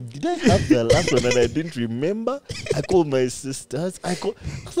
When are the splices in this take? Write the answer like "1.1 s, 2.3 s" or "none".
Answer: none